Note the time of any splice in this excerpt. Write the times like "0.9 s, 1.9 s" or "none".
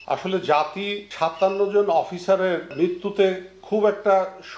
1.0 s, 2.7 s